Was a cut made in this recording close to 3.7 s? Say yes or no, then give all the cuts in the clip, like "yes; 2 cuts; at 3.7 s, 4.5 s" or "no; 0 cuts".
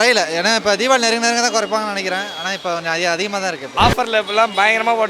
yes; 1 cut; at 3.7 s